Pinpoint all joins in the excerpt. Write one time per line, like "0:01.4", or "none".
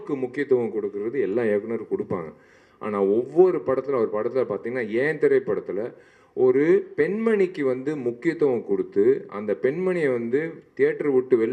none